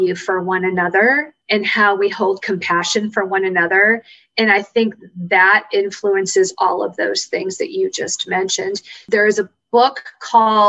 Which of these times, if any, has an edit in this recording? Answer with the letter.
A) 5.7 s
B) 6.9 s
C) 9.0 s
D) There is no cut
C